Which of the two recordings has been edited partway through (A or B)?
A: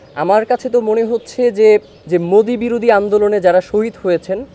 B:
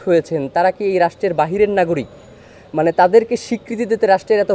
A